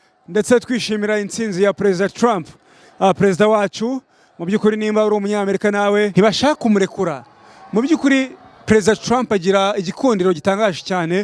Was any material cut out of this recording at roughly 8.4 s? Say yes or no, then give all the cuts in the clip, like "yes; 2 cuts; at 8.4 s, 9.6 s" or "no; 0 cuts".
no; 1 cut; at 6.1 s